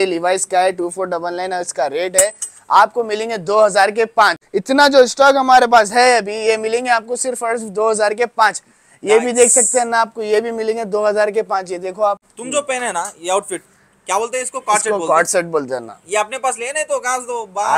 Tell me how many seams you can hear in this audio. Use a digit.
2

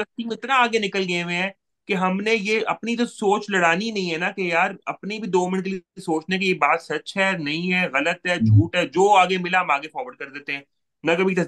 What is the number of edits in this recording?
0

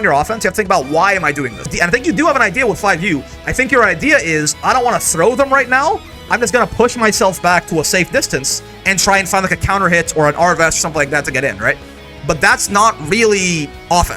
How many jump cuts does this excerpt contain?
1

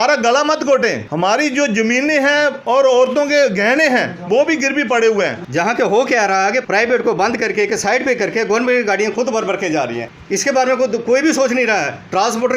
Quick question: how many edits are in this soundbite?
3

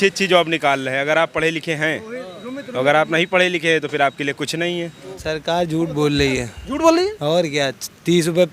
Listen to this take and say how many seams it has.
1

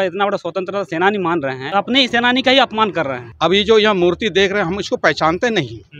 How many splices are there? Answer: 2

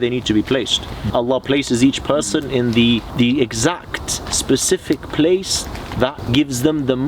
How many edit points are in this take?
3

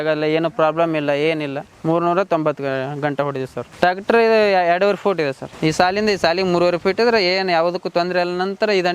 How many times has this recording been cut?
3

